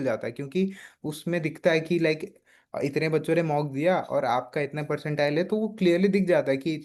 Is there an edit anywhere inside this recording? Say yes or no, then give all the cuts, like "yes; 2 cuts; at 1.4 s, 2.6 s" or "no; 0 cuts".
no; 0 cuts